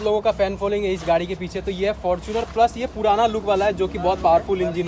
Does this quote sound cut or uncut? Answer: uncut